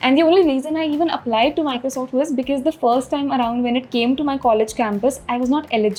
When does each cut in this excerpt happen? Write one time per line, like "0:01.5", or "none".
none